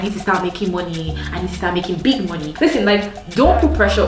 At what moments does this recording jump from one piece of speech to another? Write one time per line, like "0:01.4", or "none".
0:02.5